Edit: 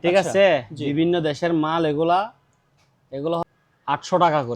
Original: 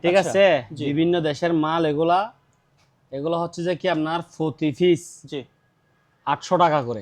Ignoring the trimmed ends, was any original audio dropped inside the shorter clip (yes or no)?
yes